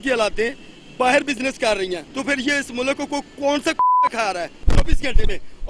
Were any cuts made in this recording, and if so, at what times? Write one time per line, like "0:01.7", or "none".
0:02.1
0:04.6